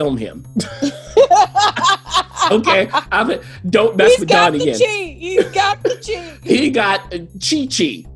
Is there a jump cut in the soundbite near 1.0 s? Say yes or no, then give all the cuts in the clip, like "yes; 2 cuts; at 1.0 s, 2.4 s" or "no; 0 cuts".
no; 0 cuts